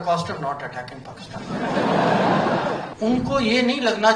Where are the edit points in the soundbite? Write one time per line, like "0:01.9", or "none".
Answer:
0:02.8